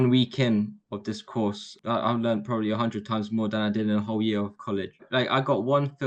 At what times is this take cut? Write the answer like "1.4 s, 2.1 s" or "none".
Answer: 1.7 s, 5.0 s